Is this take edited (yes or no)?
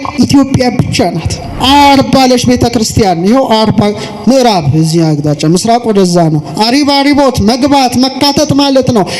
yes